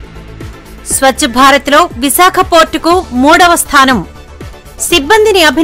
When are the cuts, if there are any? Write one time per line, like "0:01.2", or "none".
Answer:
0:01.0